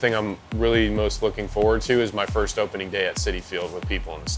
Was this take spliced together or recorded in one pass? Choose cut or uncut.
uncut